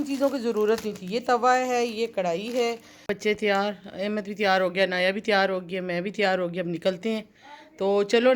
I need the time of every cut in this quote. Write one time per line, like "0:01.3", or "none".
0:03.1